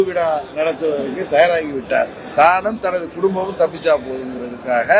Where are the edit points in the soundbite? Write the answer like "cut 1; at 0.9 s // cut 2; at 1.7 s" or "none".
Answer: cut 1; at 2.2 s

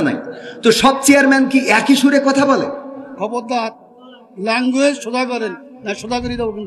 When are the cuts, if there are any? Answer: cut 1; at 3.1 s

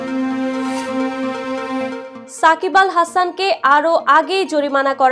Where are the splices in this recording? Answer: none

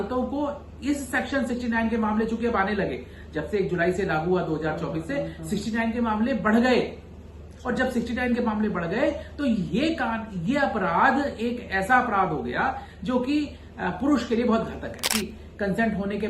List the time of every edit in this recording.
cut 1; at 15.1 s

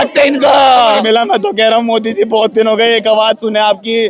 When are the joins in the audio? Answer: cut 1; at 1.0 s

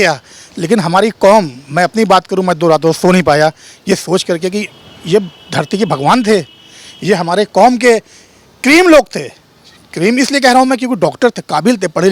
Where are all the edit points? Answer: none

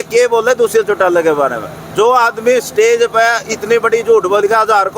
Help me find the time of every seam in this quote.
none

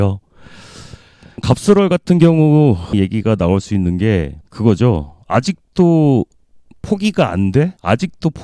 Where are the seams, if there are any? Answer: none

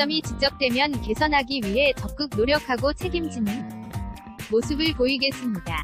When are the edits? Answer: none

